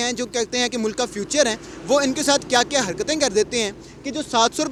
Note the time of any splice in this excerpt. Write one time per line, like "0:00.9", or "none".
none

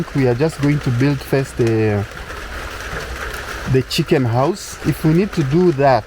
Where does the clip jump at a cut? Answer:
0:04.7

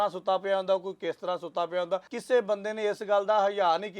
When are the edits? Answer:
0:02.1

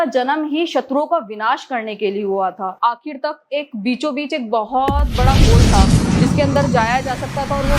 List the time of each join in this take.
0:02.7

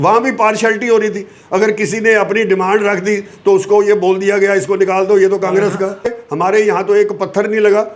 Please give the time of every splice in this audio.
0:06.1

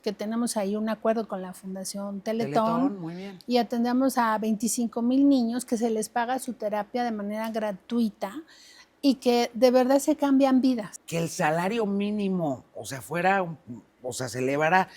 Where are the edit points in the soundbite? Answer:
0:11.0

